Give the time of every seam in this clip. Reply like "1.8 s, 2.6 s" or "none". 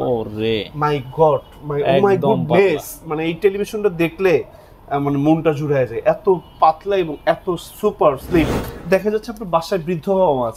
8.7 s